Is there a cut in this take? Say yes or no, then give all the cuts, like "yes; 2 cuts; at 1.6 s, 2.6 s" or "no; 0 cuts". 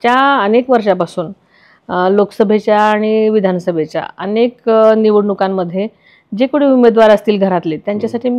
no; 0 cuts